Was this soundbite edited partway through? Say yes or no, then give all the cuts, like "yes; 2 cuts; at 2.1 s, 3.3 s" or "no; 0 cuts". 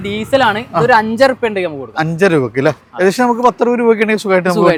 no; 0 cuts